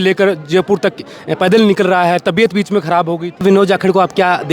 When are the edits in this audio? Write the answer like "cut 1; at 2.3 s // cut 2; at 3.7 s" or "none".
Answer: cut 1; at 3.4 s